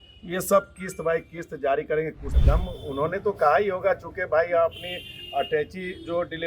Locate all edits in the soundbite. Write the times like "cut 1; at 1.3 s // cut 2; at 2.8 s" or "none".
cut 1; at 2.3 s